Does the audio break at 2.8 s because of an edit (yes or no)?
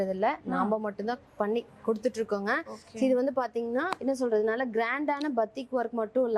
no